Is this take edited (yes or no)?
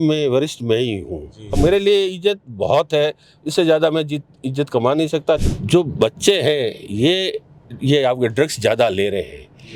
yes